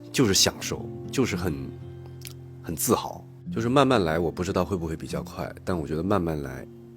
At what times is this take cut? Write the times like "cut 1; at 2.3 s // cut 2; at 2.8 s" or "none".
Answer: cut 1; at 3.3 s